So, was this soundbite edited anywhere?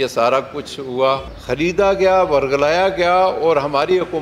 yes; 1 cut; at 1.3 s

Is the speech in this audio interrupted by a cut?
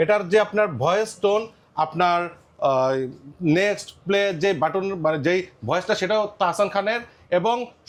no; 0 cuts

